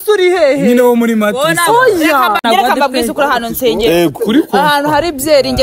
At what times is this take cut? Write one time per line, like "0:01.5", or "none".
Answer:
0:02.4